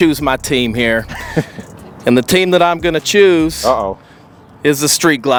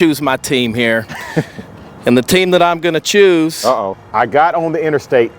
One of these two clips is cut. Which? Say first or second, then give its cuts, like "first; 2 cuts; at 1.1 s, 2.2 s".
second; 1 cut; at 4.0 s